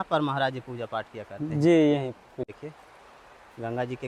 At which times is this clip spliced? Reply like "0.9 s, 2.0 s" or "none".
2.5 s